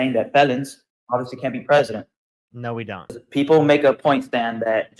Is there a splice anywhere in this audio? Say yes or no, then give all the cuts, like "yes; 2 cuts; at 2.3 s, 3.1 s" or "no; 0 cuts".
yes; 1 cut; at 3.2 s